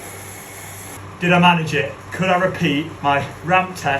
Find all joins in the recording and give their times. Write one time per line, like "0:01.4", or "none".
0:01.0
0:02.9

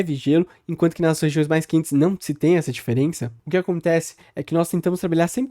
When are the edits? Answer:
0:03.2

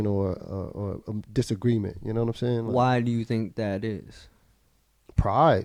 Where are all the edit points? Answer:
none

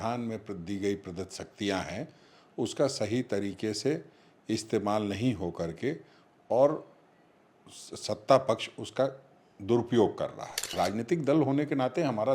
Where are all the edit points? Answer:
0:10.7

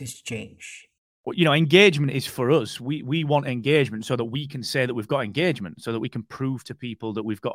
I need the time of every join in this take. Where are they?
0:01.0

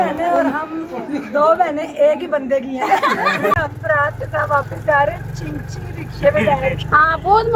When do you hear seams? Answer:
0:03.6

